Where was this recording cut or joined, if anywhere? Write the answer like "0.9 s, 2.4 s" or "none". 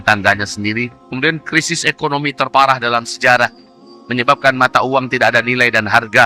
1.0 s